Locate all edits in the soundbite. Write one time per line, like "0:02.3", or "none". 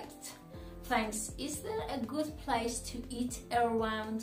none